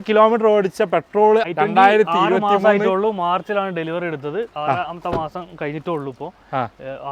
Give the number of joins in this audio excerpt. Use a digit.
1